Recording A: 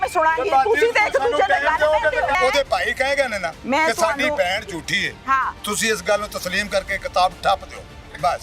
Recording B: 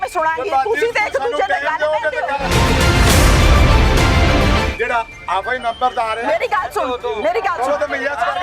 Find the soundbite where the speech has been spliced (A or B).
A